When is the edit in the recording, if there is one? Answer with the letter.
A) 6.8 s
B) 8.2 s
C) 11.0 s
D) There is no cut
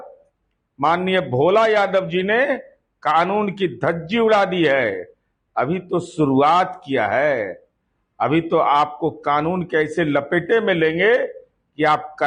D